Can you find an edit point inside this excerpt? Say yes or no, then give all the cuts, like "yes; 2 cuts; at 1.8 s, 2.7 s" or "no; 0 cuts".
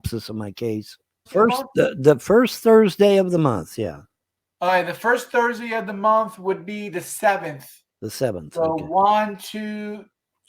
yes; 1 cut; at 1.3 s